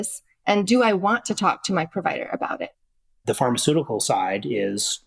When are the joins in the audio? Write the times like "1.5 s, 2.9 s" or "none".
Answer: 2.7 s